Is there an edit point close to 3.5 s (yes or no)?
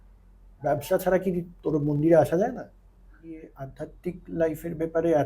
yes